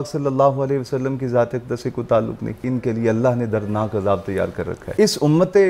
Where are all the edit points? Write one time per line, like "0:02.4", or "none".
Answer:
0:02.6
0:04.8

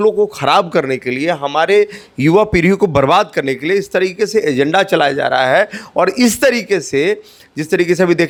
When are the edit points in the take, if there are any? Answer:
none

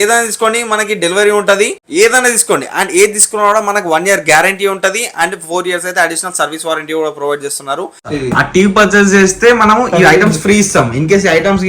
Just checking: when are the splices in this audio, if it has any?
0:01.8
0:08.1

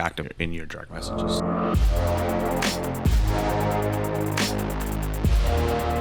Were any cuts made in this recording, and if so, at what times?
0:01.3

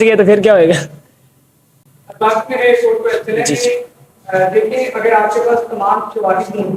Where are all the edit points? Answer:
none

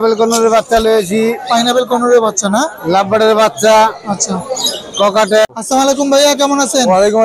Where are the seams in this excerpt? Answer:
0:05.4

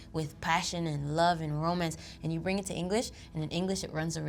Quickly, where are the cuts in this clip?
none

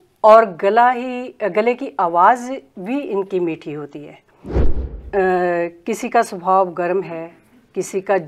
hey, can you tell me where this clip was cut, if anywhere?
0:04.7

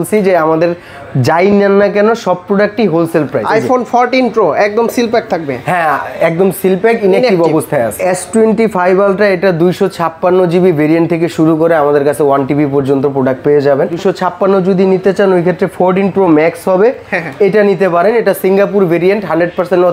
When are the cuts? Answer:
0:03.4
0:07.9
0:14.0

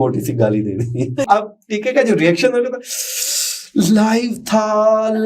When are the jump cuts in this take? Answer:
0:01.3

